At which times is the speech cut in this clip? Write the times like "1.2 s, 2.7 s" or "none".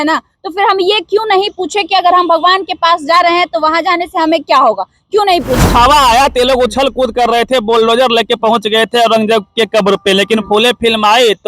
5.6 s